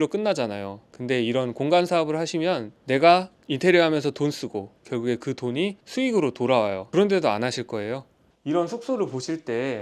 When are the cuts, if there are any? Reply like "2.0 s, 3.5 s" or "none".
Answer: 8.3 s